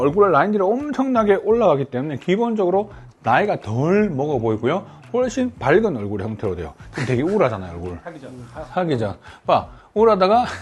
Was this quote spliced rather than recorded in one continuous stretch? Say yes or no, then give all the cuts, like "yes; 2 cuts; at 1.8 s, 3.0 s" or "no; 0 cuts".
no; 0 cuts